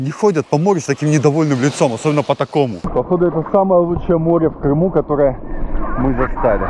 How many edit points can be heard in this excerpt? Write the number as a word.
one